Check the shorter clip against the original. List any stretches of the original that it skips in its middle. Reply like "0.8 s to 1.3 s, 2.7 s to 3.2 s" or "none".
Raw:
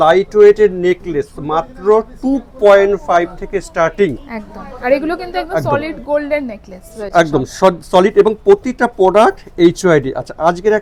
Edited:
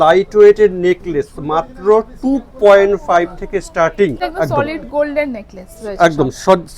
4.2 s to 5.3 s